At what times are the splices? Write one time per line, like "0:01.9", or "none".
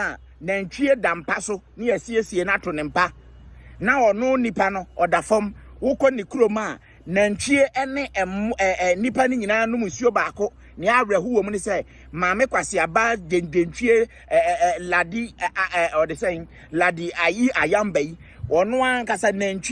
none